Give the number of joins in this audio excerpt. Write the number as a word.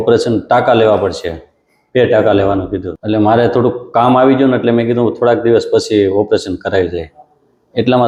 zero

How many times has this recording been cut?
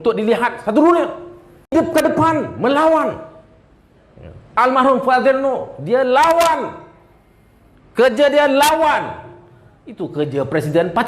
one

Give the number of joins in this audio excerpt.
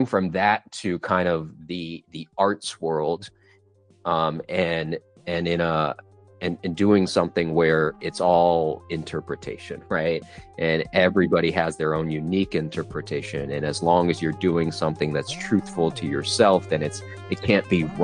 zero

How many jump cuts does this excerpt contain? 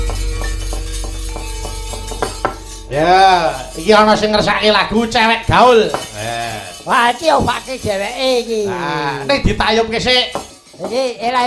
one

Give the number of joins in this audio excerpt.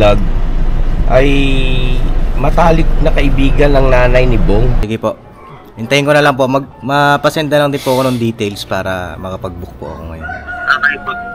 one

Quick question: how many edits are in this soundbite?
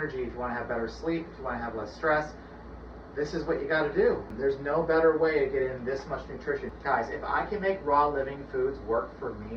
two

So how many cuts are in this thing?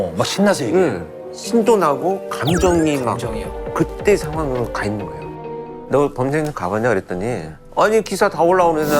one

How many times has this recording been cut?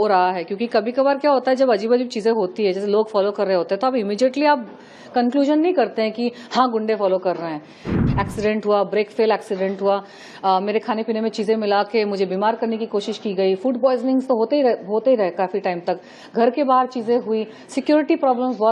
one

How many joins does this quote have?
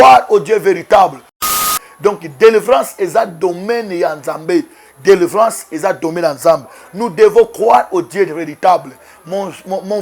one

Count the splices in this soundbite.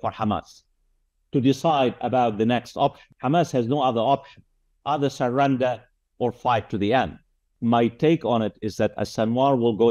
two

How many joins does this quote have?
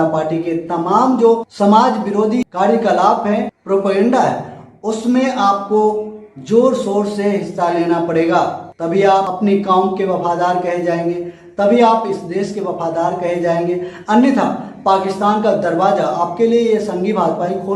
two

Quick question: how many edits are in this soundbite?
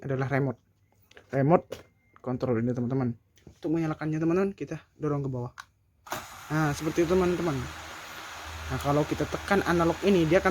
one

